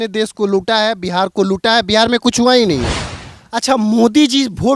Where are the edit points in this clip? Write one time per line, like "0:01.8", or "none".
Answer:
0:03.0